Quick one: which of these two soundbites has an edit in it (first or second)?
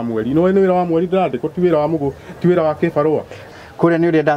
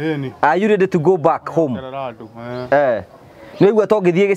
first